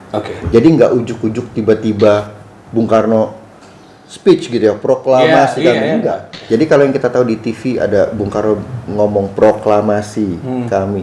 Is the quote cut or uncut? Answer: cut